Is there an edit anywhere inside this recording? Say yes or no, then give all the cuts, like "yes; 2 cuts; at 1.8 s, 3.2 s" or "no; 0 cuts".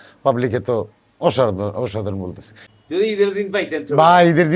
yes; 1 cut; at 2.5 s